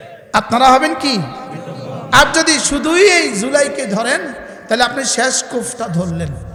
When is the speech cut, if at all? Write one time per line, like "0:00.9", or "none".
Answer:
none

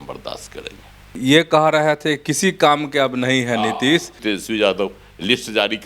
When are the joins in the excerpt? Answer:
0:01.2
0:04.1

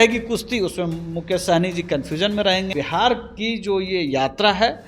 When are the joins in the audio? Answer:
0:02.7

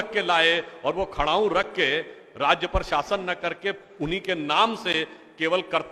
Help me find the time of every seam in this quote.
none

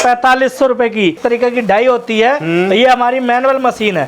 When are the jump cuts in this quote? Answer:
0:01.2

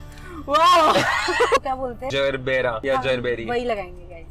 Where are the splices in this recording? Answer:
0:01.6
0:02.8

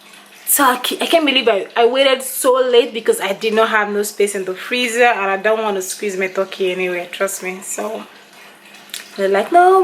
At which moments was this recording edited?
none

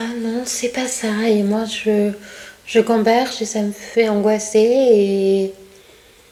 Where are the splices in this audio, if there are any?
none

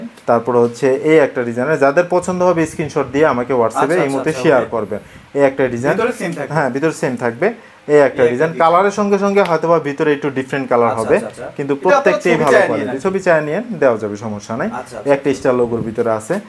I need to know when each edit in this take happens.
none

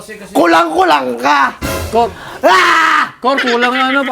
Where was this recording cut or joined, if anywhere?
none

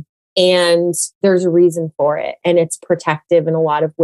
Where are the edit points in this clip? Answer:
none

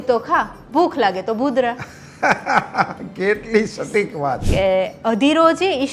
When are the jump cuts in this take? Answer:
0:04.4

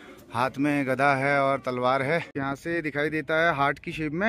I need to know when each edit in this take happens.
0:02.4

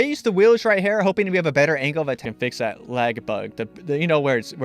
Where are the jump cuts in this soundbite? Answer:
none

